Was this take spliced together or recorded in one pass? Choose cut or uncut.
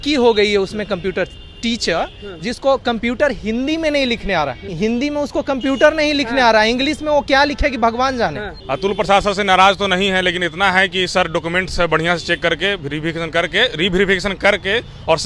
cut